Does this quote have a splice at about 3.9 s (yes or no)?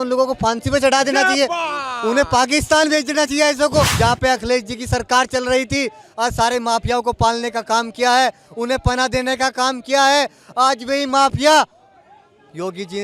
yes